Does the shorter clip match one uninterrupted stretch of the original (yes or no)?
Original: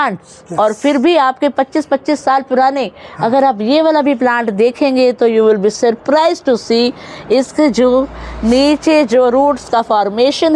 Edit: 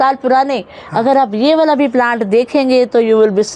yes